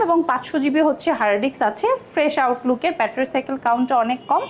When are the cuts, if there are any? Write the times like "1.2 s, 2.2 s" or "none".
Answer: none